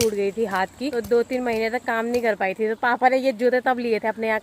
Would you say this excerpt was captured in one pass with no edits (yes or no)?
no